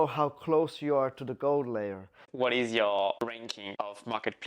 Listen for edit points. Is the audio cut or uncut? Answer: cut